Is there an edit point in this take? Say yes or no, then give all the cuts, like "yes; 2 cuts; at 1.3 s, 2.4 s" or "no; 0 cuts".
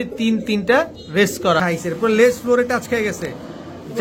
yes; 1 cut; at 1.6 s